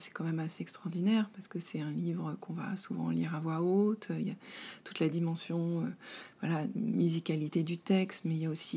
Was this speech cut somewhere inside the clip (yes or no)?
no